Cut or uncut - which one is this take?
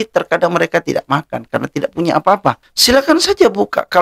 cut